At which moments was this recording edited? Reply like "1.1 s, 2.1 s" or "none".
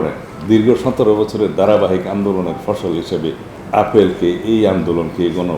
3.5 s